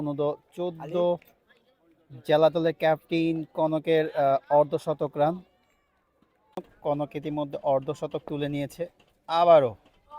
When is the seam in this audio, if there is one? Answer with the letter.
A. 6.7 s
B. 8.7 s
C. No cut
A